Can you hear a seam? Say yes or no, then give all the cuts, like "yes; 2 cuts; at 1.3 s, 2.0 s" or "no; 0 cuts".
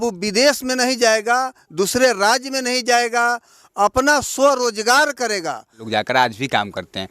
yes; 1 cut; at 5.8 s